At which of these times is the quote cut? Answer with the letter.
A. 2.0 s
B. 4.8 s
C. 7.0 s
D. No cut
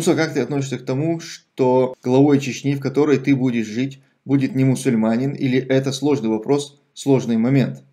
A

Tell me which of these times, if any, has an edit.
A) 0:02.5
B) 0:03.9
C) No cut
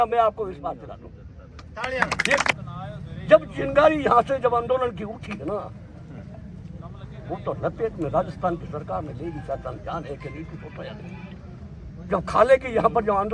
A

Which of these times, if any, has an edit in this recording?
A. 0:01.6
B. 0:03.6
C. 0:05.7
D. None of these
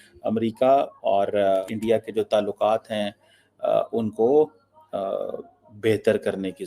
A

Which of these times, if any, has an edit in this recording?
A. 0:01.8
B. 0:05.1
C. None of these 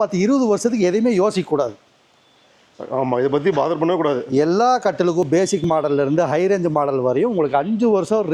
C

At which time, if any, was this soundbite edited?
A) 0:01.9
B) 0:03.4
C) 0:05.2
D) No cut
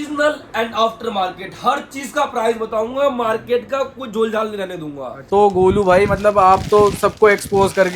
C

